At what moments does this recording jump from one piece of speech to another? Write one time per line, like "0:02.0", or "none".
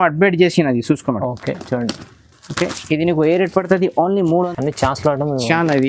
0:04.5